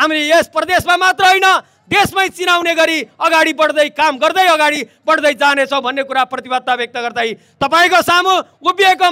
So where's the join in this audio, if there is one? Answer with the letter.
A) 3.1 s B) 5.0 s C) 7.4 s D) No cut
D